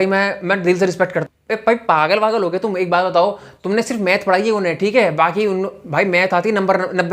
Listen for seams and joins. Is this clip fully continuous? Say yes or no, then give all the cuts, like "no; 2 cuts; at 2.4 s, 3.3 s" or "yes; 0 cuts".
no; 1 cut; at 1.2 s